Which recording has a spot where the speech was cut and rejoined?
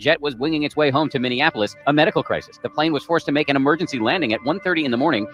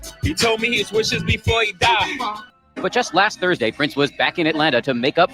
second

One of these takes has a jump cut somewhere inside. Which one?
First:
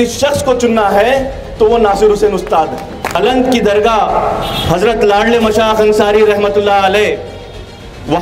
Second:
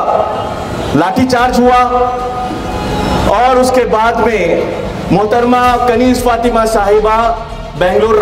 first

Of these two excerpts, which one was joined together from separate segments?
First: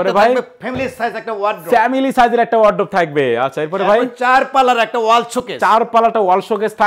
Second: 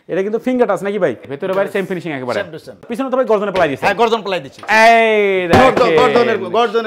second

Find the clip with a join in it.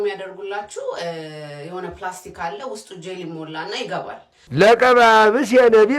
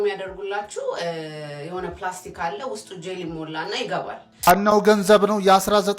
second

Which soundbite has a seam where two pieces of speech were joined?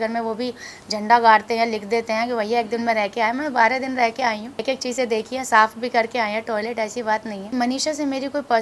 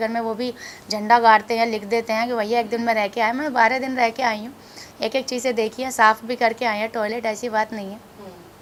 first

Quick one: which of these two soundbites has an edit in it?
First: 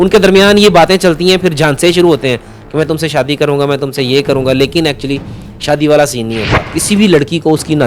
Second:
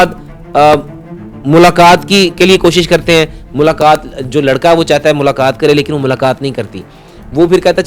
first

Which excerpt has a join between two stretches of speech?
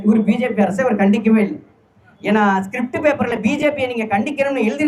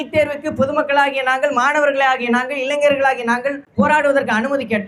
second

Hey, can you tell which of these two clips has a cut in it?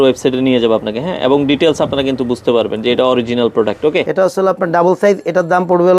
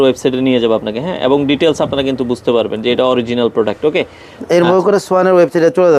first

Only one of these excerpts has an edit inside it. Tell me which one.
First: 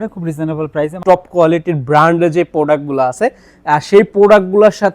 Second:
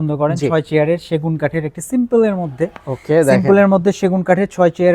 first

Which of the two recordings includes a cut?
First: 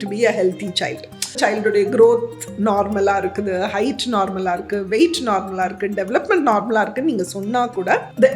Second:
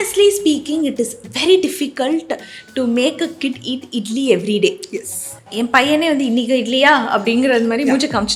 first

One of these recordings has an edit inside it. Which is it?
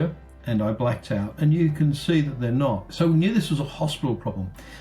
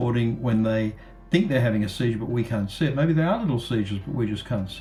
first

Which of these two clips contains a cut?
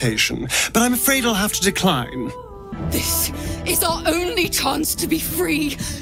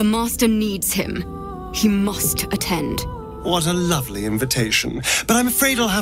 first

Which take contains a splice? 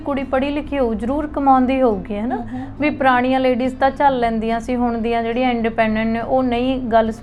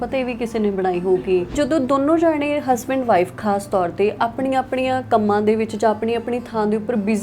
second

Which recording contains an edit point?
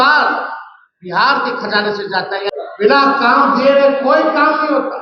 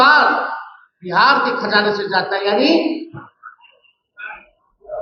first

